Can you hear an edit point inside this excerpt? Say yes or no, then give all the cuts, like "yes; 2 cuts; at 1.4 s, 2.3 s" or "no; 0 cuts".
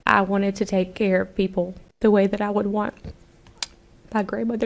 yes; 1 cut; at 1.8 s